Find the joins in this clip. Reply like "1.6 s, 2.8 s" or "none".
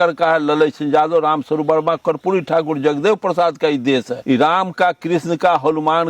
4.1 s

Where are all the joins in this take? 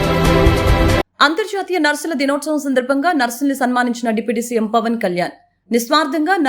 1.0 s

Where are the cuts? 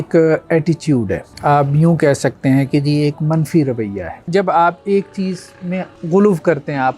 1.2 s, 4.3 s, 5.9 s

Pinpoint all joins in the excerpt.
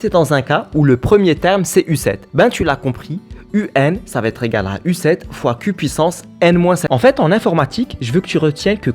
6.8 s

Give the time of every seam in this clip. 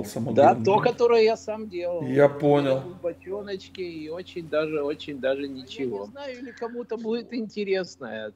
6.5 s

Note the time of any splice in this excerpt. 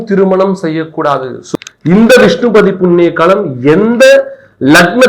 1.4 s

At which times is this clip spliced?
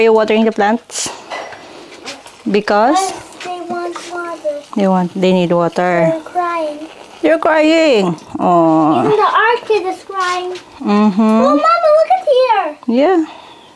none

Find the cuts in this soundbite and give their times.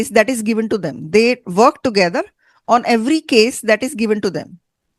none

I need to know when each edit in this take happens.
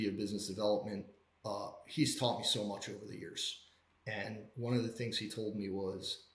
none

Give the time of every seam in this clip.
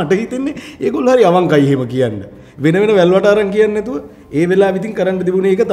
none

